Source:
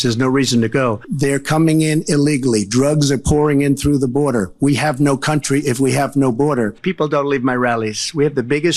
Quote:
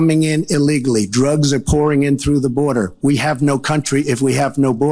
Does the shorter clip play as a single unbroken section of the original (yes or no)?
yes